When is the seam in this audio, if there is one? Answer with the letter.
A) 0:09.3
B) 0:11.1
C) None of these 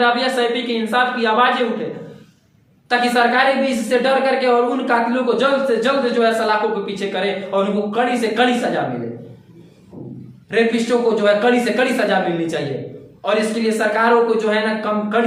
C